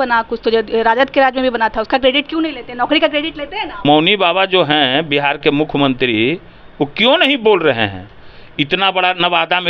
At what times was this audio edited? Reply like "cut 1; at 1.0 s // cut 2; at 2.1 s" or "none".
cut 1; at 3.8 s

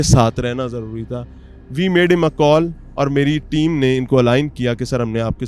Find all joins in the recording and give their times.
none

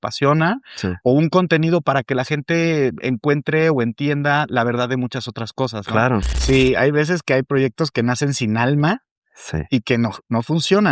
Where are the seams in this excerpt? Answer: cut 1; at 6.3 s

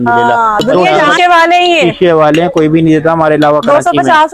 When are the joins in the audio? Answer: cut 1; at 1.0 s

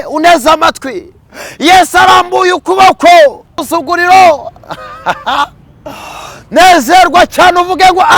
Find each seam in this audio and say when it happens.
cut 1; at 3.6 s

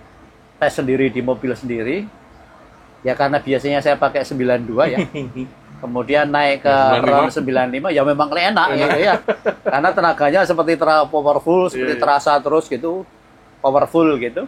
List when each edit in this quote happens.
none

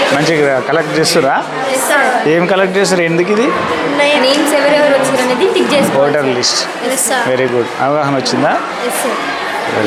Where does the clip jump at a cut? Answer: none

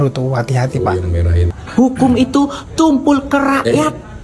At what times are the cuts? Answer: cut 1; at 1.4 s

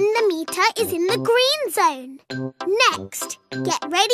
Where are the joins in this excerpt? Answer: none

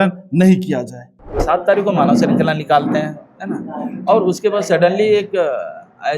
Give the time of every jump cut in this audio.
cut 1; at 1.4 s

